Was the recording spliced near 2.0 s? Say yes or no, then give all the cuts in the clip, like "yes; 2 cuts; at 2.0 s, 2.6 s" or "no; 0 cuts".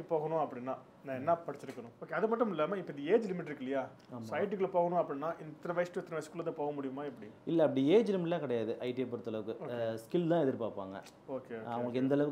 yes; 1 cut; at 2.0 s